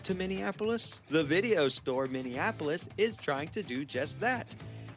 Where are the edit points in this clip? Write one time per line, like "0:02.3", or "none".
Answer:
0:01.0